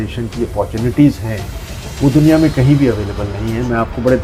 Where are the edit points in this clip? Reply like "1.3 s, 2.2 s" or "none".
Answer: none